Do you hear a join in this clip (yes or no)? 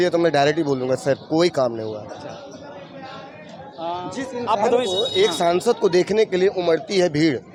no